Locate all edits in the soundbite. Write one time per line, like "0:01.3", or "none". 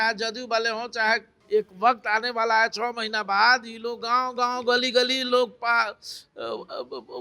0:01.3